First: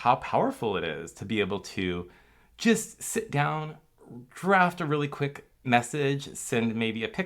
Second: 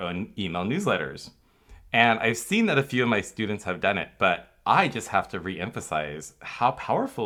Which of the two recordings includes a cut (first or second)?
first